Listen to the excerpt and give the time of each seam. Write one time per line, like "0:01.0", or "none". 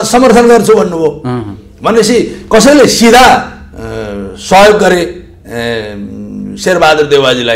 none